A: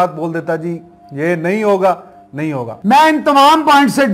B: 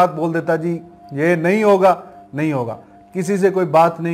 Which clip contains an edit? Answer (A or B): A